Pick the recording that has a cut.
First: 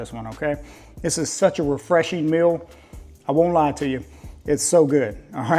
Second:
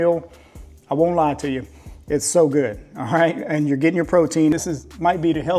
second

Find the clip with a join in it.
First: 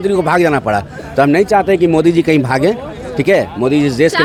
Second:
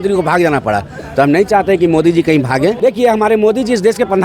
second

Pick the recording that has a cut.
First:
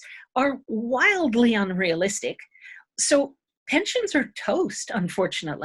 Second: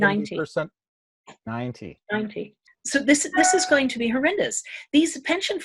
second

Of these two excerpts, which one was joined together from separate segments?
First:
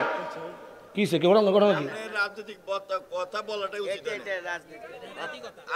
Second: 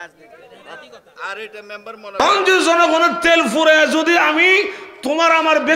second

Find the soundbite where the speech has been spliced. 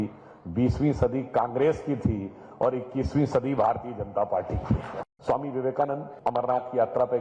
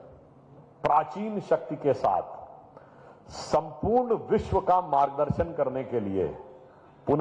first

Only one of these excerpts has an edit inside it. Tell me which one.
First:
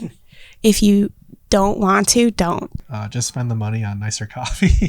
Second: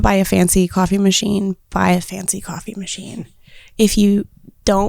first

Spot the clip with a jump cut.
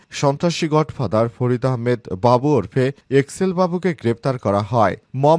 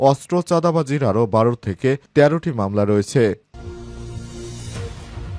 second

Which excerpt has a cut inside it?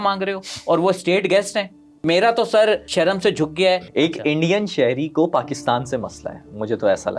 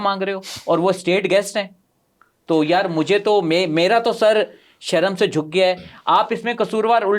first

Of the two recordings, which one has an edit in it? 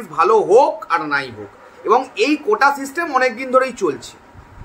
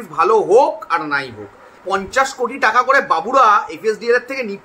second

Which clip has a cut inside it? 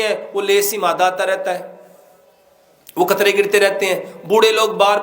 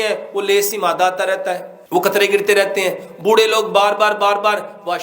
second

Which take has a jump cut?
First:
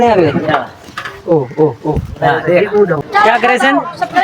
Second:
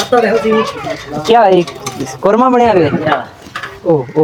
first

